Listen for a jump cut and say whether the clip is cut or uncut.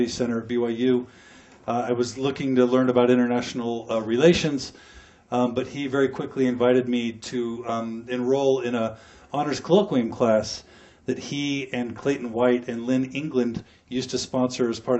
uncut